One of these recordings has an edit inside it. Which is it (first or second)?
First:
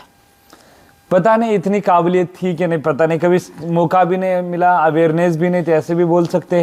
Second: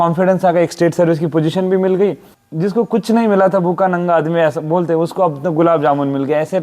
second